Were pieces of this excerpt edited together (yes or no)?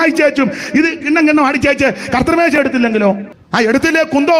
yes